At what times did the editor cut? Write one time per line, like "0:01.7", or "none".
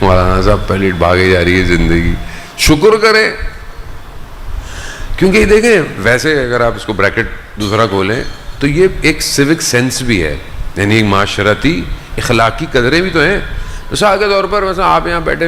none